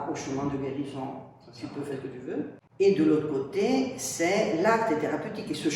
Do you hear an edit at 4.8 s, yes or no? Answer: no